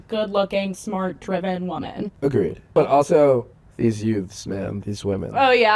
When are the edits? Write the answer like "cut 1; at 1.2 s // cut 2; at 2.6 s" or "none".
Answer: cut 1; at 2.5 s // cut 2; at 3.6 s